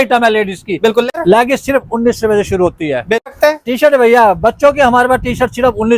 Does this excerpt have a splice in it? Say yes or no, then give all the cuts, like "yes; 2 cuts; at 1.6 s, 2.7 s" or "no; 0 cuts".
yes; 2 cuts; at 1.1 s, 3.3 s